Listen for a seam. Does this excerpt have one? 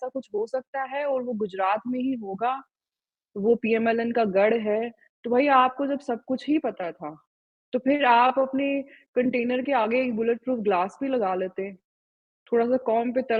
no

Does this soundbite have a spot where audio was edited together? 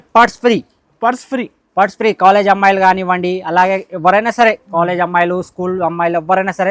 no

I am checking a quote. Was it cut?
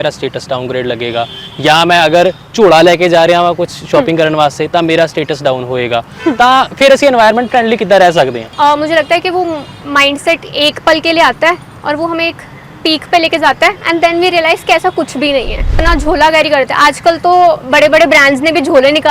yes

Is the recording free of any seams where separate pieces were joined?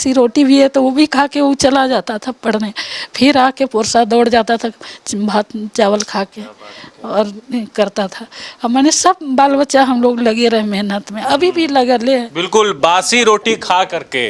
yes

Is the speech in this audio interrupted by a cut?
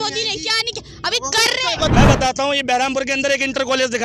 yes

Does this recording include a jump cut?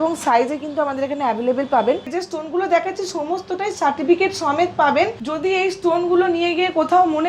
yes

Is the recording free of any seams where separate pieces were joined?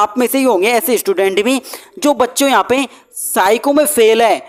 yes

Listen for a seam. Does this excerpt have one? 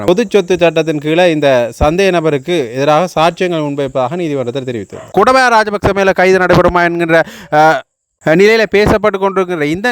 yes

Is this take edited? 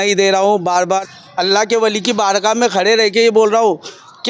yes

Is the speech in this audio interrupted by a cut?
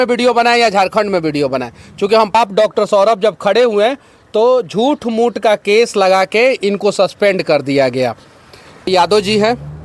yes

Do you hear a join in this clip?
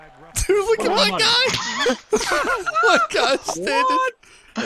no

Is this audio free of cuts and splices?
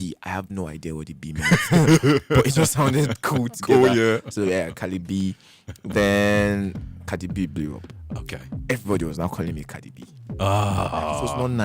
yes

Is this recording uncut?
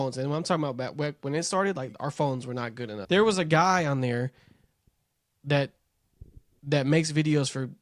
no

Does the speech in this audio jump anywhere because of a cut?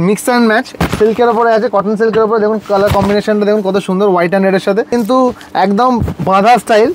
yes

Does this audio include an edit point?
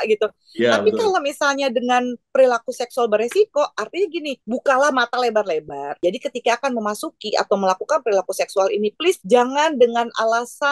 yes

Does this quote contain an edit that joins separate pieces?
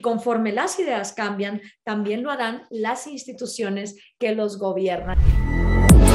yes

